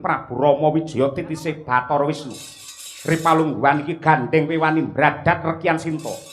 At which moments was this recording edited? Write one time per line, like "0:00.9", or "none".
none